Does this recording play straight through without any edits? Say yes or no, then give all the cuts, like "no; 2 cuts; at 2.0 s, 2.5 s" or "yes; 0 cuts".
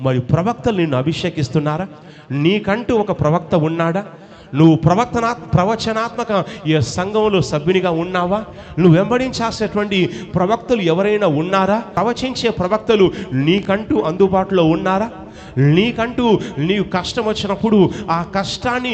no; 1 cut; at 11.9 s